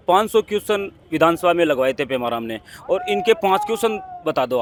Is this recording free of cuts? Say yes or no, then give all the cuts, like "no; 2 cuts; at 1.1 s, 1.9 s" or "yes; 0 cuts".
yes; 0 cuts